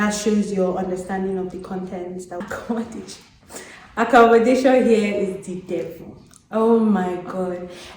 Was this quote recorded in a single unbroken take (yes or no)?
no